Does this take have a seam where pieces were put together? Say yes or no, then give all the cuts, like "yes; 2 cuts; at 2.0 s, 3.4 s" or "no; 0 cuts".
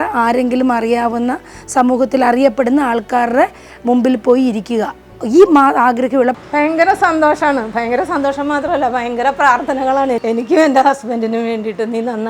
yes; 2 cuts; at 6.4 s, 10.2 s